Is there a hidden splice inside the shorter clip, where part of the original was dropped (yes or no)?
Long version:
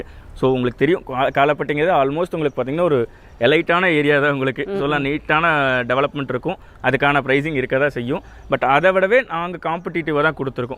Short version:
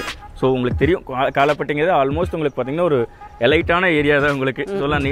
no